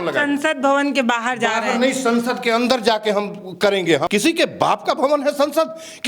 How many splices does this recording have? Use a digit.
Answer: 1